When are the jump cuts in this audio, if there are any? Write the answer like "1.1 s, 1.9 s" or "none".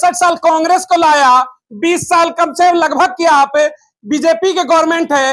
none